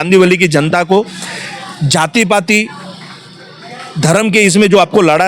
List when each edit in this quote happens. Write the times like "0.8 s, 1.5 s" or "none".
none